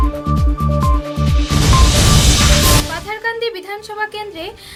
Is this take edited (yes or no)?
no